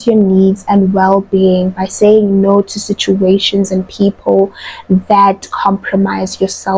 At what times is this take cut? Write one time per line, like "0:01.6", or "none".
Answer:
none